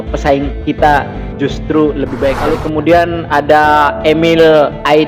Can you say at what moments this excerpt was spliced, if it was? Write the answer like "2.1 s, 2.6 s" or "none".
2.5 s